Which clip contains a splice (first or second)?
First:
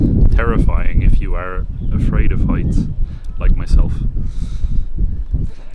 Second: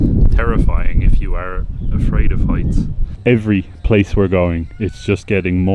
second